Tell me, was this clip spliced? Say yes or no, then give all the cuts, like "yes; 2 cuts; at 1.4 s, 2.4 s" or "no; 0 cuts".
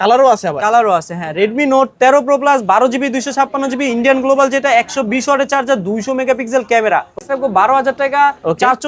yes; 1 cut; at 7.2 s